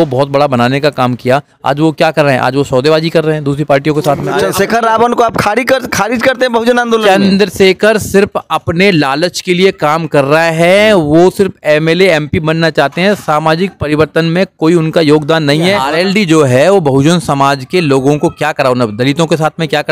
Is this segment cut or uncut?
cut